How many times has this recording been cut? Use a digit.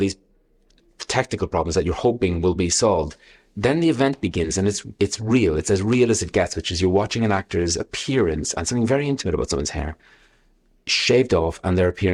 0